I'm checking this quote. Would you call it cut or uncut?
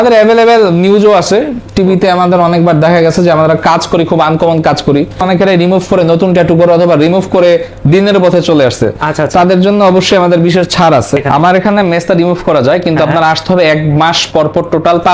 cut